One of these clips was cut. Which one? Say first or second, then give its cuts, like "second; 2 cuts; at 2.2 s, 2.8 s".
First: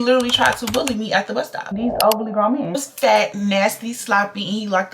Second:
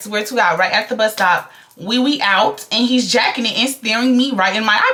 first; 2 cuts; at 1.6 s, 2.7 s